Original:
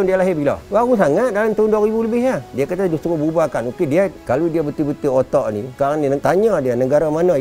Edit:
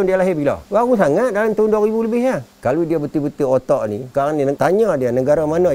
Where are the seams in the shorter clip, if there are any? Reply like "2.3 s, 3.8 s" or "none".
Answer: 2.5 s